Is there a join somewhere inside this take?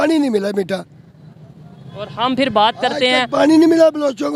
no; 0 cuts

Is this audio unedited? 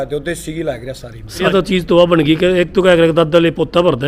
no; 1 cut; at 1.4 s

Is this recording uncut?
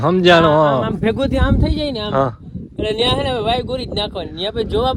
yes; 0 cuts

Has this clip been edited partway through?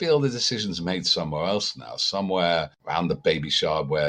yes; 1 cut; at 2.8 s

